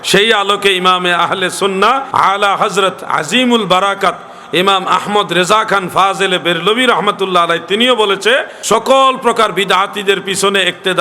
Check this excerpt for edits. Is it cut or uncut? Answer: cut